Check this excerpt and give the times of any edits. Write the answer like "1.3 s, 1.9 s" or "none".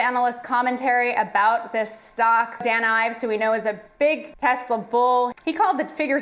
2.6 s, 4.3 s, 5.4 s